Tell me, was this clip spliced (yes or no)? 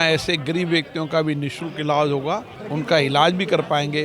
yes